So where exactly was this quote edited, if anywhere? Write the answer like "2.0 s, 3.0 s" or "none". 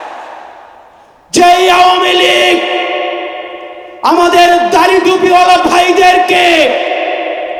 none

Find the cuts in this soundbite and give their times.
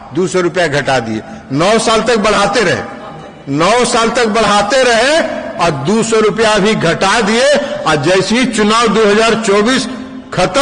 none

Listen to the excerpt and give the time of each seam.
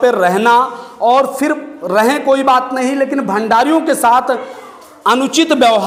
none

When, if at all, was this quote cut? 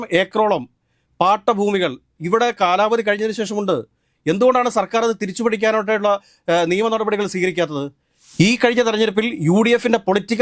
none

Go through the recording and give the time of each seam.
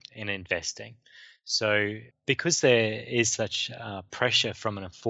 2.1 s

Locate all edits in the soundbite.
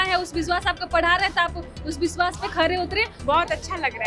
3.1 s

